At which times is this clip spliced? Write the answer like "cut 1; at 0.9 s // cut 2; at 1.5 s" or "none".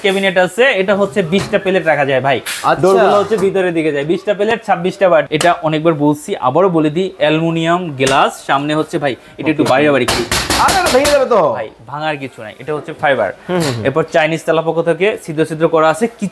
cut 1; at 5.3 s